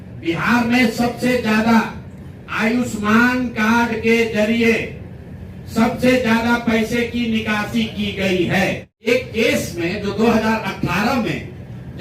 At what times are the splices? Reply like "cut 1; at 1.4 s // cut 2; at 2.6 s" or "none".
cut 1; at 9.1 s